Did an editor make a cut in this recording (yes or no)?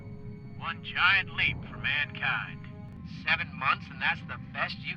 yes